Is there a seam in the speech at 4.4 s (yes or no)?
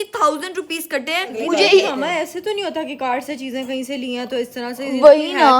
no